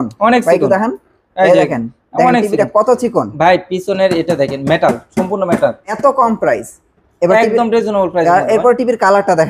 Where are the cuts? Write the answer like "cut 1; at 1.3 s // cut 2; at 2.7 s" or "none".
cut 1; at 5.9 s